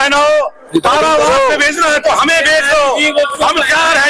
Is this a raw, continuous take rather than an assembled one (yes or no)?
yes